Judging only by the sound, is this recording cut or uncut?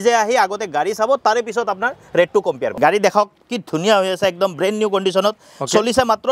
cut